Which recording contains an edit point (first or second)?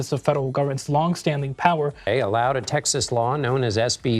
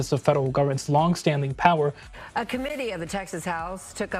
first